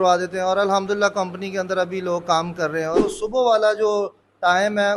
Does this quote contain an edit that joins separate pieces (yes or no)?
yes